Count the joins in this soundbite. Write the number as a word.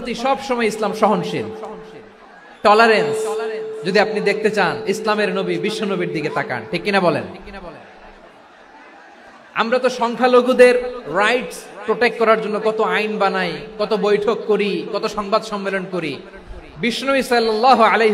zero